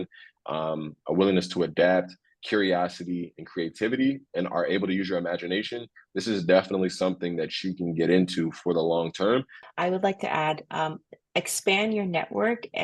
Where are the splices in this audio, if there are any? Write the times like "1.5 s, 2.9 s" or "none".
9.6 s